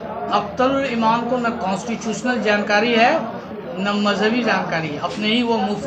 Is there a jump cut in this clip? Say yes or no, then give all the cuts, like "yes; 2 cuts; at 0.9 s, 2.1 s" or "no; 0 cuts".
no; 0 cuts